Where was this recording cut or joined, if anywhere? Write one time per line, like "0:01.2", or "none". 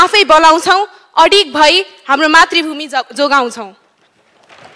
none